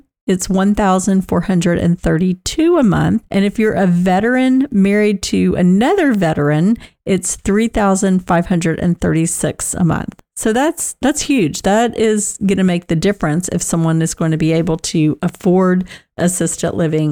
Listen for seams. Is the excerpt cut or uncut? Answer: uncut